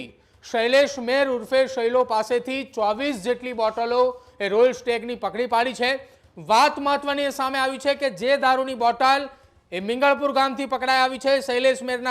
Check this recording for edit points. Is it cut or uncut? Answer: uncut